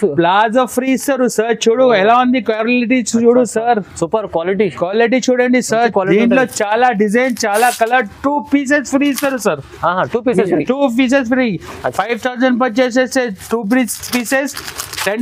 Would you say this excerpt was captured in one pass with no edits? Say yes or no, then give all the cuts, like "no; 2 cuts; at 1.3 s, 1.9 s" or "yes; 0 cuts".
yes; 0 cuts